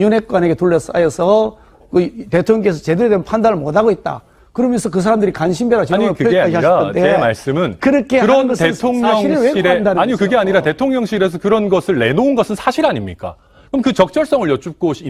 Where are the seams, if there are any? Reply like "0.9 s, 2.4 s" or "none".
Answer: none